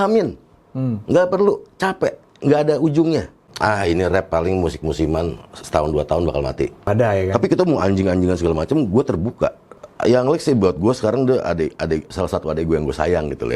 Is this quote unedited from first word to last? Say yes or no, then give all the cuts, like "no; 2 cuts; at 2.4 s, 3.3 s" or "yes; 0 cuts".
no; 3 cuts; at 3.5 s, 6.8 s, 9.8 s